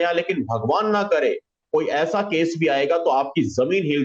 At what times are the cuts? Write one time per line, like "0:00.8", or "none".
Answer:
0:01.6